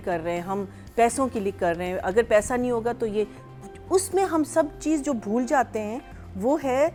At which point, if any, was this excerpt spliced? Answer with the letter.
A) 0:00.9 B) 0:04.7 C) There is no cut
C